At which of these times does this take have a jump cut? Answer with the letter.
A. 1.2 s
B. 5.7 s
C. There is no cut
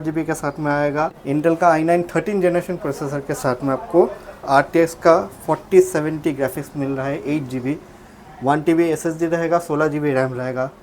A